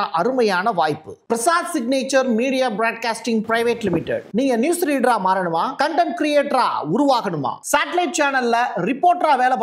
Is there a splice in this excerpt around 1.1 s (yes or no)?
yes